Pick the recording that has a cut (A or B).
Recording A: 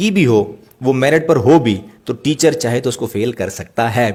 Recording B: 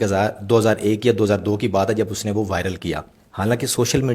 B